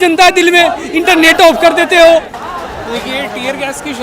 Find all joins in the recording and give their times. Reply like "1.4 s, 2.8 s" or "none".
2.4 s